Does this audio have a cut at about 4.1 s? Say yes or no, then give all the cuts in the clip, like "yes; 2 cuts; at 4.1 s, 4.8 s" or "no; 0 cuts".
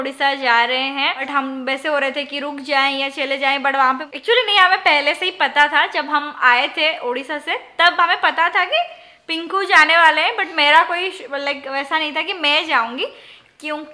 yes; 2 cuts; at 1.2 s, 4.1 s